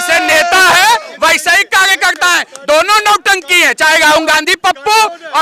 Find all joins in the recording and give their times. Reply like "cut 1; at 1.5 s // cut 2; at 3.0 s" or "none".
none